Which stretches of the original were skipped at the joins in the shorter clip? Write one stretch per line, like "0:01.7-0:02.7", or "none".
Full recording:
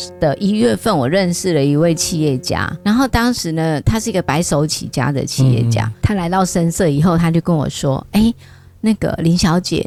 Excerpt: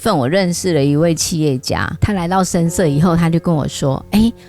0:02.7-0:05.9